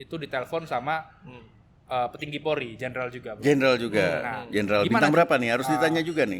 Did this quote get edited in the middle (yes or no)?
no